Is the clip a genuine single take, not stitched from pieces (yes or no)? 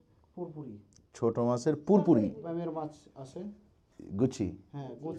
no